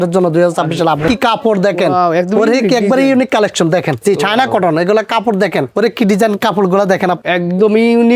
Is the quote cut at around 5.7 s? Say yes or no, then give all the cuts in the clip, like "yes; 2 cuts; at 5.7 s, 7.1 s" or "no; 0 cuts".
yes; 4 cuts; at 1.0 s, 4.0 s, 5.7 s, 7.2 s